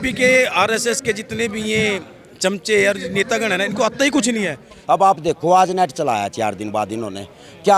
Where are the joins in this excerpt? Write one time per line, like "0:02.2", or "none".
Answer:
0:04.8